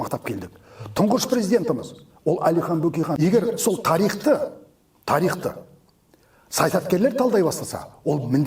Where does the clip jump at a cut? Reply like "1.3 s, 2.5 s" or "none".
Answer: 3.2 s